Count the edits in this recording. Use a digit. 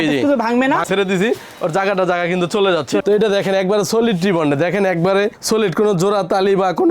2